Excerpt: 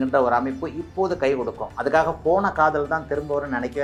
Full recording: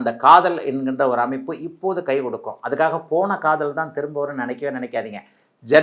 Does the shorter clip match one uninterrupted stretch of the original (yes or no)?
yes